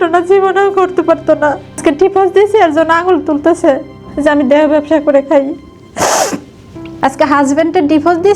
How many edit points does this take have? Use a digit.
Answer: 2